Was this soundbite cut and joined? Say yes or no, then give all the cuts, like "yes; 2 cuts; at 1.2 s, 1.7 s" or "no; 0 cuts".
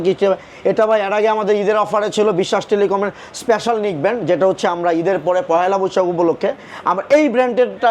no; 0 cuts